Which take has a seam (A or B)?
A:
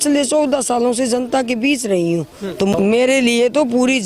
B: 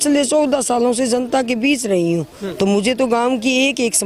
A